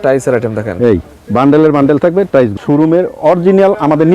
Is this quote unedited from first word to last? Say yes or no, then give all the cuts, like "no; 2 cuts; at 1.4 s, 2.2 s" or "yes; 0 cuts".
no; 1 cut; at 2.6 s